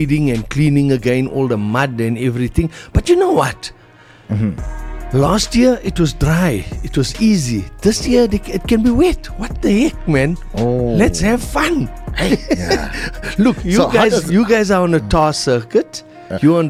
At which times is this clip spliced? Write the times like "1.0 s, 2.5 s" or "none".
none